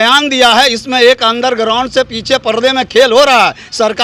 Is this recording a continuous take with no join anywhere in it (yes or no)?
yes